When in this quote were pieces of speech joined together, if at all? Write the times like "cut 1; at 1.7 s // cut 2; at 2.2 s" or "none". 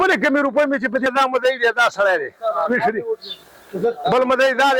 cut 1; at 1.1 s

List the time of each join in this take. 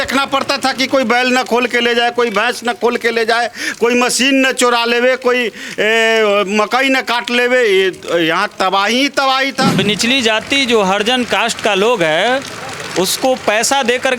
cut 1; at 9.8 s

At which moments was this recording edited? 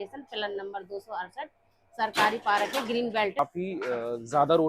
cut 1; at 3.4 s

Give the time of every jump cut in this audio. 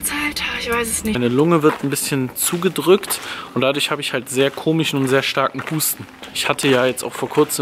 cut 1; at 1.2 s // cut 2; at 6.3 s

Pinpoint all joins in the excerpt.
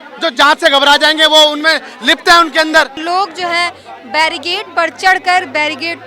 cut 1; at 3.0 s

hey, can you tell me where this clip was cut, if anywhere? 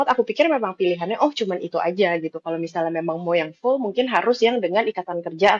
none

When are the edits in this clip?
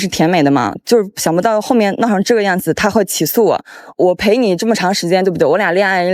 none

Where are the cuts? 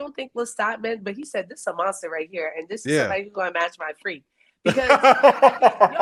none

